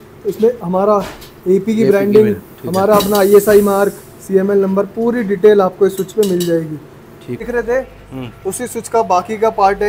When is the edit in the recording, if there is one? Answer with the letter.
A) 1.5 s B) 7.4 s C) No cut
B